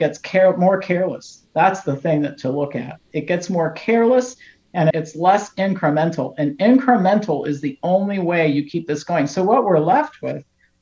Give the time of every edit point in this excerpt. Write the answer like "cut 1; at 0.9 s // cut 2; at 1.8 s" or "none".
cut 1; at 4.9 s